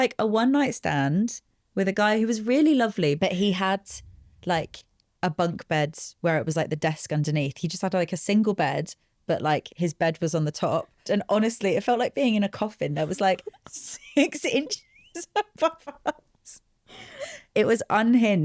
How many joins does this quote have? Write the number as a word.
two